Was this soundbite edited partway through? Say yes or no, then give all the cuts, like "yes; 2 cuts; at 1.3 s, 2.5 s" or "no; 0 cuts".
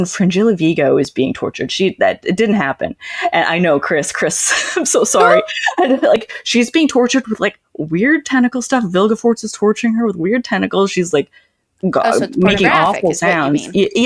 no; 0 cuts